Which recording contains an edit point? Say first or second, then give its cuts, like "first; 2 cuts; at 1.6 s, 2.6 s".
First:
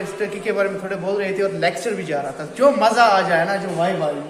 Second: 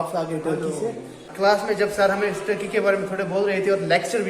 second; 1 cut; at 1.2 s